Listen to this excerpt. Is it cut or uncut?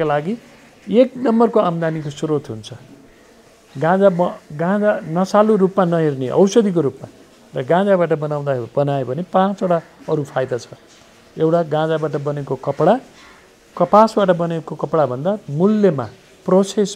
uncut